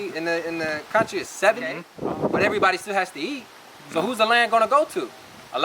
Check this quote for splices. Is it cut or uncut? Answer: cut